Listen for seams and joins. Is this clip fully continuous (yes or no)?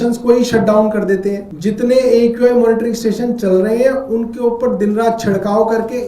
no